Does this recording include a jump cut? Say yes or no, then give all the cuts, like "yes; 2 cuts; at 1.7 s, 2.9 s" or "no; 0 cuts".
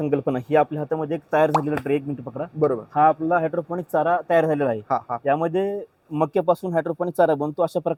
no; 0 cuts